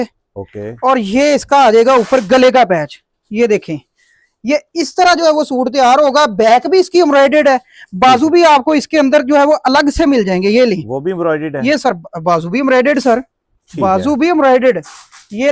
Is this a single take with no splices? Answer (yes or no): yes